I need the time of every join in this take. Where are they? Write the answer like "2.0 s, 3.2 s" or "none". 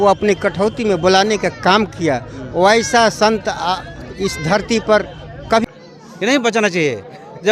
5.6 s